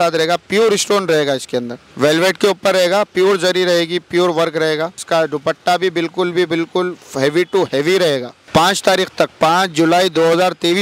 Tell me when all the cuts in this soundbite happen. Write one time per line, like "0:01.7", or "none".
0:01.8
0:05.0
0:08.3